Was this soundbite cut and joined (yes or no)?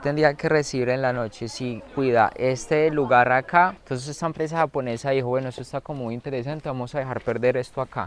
yes